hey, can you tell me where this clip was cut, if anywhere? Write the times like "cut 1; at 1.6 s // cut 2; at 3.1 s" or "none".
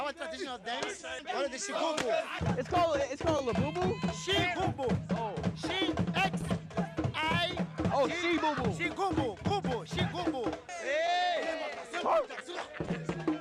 none